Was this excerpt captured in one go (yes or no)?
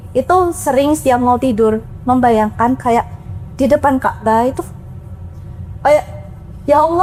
yes